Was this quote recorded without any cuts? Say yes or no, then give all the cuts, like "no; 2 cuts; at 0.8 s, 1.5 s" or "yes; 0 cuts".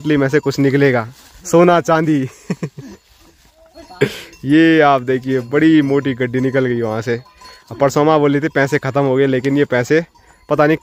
yes; 0 cuts